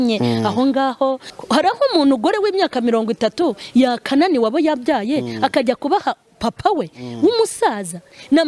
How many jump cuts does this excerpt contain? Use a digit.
1